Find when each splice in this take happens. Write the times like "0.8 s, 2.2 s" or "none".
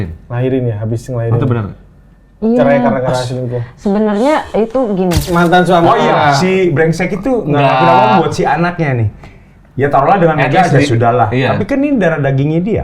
5.2 s